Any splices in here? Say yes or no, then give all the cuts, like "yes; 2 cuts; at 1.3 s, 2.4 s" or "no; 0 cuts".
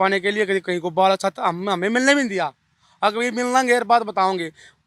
no; 0 cuts